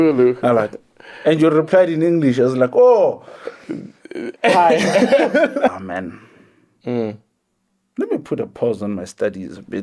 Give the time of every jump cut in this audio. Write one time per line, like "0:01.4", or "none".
0:05.7

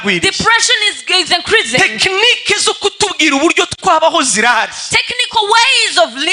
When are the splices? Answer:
none

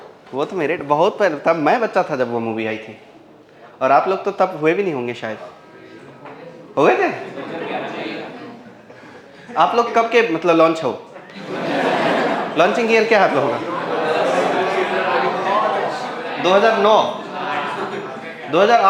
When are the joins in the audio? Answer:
none

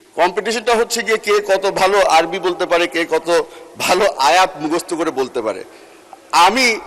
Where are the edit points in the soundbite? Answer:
none

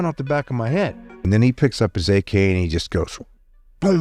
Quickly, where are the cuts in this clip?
0:01.2

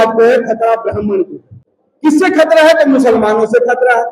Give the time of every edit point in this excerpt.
none

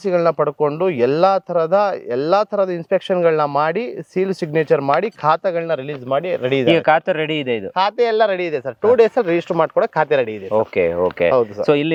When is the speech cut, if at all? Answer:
none

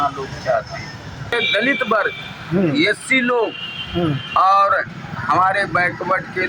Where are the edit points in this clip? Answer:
0:01.3

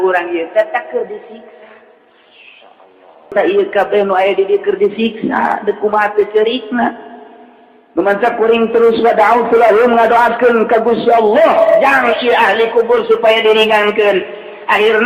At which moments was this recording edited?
0:03.3

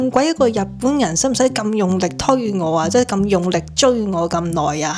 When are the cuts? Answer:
none

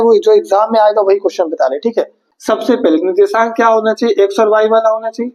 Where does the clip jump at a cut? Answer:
0:02.2

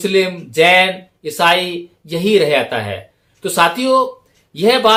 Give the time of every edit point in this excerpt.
none

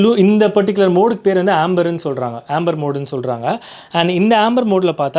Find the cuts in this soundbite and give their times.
none

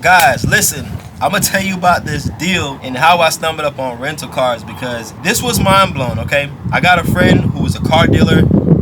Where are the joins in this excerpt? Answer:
0:02.8
0:05.1

